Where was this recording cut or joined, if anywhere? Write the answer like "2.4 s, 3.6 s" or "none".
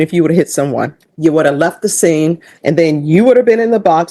1.0 s, 2.5 s